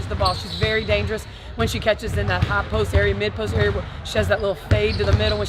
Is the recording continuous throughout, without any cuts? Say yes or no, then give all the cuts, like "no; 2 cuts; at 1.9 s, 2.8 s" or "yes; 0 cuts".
yes; 0 cuts